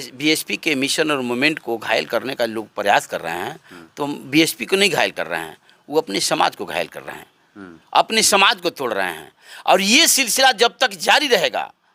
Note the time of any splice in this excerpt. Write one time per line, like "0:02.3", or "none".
none